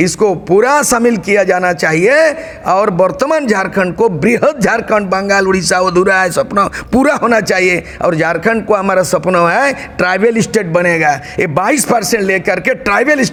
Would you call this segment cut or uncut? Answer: uncut